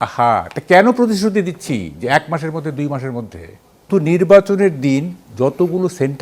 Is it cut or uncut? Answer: cut